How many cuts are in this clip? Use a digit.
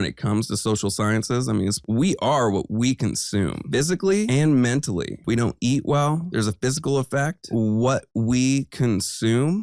2